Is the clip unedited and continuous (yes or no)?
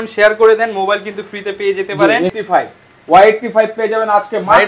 no